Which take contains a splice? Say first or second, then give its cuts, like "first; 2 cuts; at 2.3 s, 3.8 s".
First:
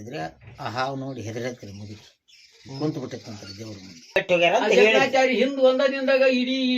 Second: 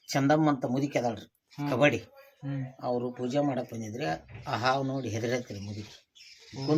first; 1 cut; at 4.2 s